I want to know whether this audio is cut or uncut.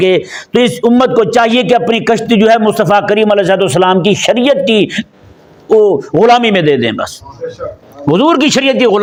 uncut